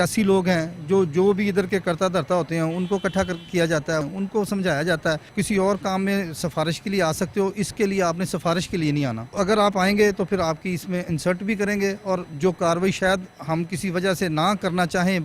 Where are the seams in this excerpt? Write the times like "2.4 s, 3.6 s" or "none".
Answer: 4.1 s, 5.3 s, 9.3 s, 12.3 s